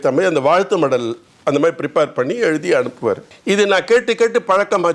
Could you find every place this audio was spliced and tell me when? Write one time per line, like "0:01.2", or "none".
none